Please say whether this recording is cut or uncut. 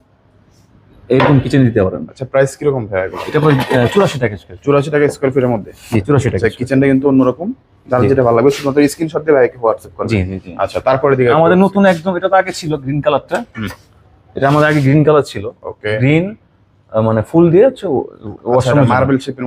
uncut